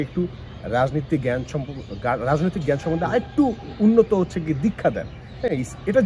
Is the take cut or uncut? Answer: uncut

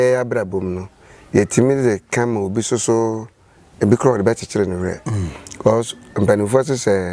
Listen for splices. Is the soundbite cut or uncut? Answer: uncut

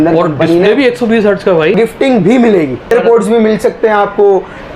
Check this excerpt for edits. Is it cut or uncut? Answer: cut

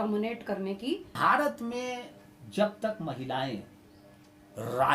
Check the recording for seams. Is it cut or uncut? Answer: cut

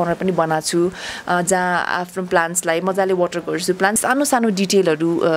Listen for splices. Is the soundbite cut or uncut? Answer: cut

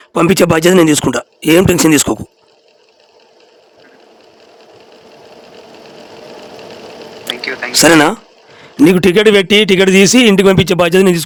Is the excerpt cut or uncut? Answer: uncut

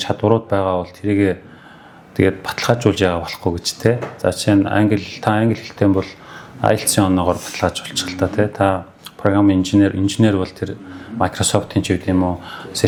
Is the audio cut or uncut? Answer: uncut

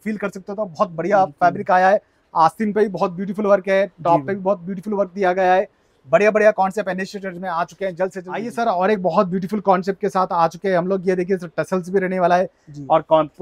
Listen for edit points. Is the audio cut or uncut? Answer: uncut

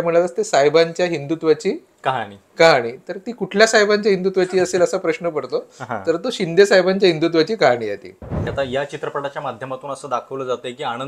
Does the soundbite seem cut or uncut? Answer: cut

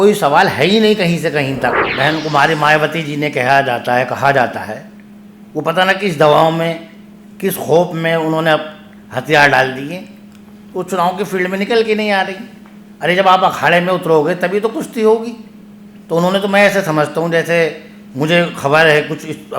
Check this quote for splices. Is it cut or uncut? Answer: cut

